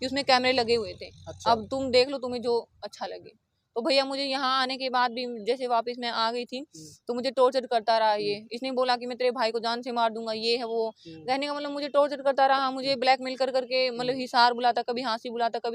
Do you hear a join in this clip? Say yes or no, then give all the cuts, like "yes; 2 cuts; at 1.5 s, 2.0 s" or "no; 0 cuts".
no; 0 cuts